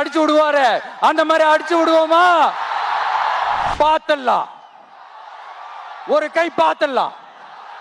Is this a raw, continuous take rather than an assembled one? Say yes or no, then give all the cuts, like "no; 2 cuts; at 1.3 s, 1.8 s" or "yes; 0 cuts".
no; 1 cut; at 3.7 s